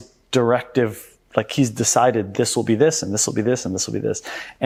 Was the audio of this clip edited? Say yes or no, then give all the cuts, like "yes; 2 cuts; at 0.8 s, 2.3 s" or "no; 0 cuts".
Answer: no; 0 cuts